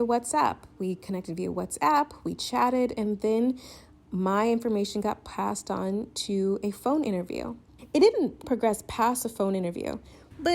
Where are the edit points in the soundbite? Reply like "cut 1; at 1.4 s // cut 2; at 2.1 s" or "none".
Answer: cut 1; at 7.7 s